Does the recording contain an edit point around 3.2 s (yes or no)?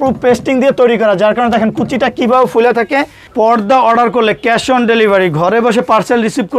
yes